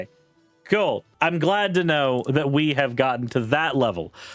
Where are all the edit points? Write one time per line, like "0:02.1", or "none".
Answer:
0:01.1